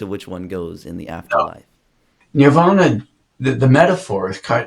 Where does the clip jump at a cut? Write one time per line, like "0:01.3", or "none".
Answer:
0:02.2